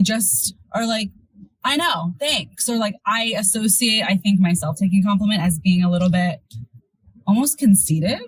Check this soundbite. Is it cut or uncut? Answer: uncut